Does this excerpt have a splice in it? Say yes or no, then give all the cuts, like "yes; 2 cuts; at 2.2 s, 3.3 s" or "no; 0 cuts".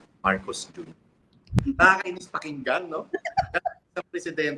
yes; 1 cut; at 1.5 s